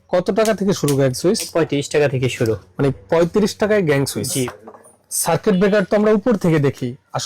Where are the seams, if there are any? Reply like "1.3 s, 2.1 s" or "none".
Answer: 1.5 s, 4.5 s